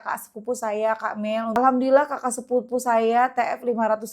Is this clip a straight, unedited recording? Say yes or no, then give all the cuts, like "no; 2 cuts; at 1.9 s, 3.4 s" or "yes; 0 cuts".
no; 1 cut; at 1.6 s